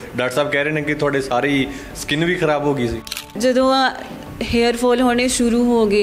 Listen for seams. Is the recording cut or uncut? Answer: cut